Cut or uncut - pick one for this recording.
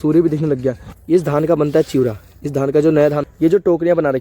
cut